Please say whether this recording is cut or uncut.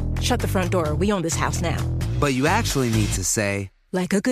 uncut